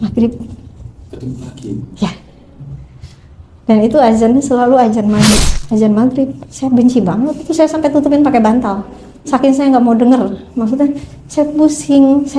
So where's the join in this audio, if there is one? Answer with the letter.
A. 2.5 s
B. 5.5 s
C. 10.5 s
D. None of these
B